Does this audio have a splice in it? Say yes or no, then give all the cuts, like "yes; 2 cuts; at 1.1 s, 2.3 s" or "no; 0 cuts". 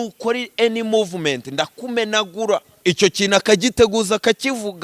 yes; 1 cut; at 2.7 s